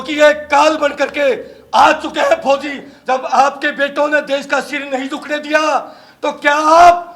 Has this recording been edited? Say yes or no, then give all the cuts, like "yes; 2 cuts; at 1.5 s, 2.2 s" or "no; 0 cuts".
yes; 1 cut; at 2.9 s